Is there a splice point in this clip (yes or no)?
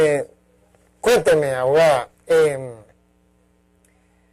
no